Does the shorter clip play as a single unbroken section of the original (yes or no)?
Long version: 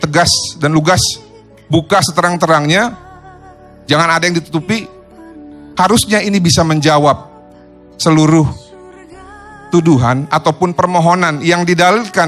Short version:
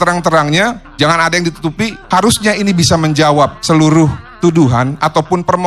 no